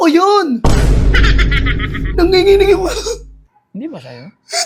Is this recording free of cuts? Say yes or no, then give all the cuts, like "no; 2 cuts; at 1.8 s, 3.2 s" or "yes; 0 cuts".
yes; 0 cuts